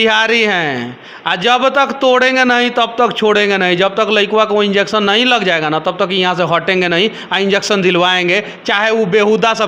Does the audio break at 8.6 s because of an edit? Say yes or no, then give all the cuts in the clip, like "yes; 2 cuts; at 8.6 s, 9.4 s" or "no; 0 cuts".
no; 0 cuts